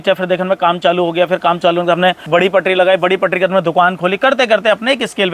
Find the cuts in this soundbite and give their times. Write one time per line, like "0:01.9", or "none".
0:02.2